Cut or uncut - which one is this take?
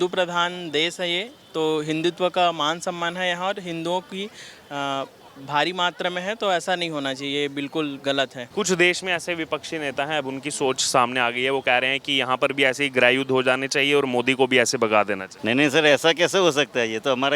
cut